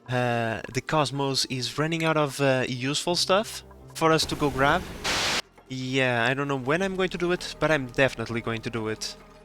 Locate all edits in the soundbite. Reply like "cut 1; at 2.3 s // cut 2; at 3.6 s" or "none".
cut 1; at 5.1 s